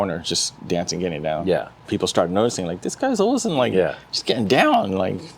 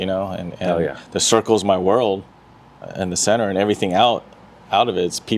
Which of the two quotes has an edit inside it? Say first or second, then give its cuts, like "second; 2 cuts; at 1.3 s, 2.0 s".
first; 1 cut; at 1.8 s